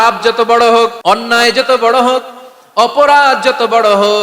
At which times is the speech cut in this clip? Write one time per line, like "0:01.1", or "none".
0:01.0